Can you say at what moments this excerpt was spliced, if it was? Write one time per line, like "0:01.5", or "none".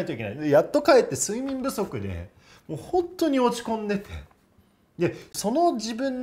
0:05.3